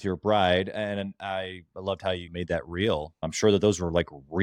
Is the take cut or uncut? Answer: cut